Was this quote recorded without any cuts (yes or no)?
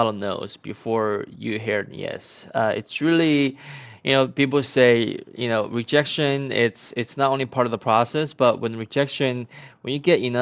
yes